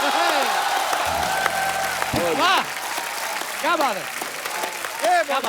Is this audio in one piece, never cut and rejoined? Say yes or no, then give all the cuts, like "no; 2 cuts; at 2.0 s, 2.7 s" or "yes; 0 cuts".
yes; 0 cuts